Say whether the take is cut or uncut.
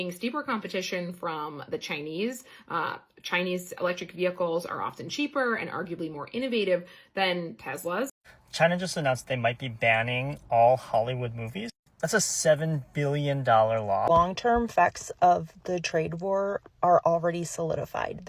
cut